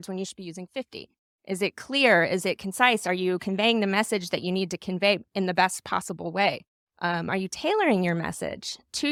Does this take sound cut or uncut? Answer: uncut